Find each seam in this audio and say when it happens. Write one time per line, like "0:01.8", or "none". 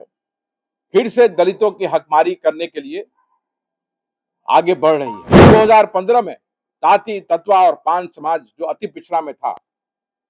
0:05.5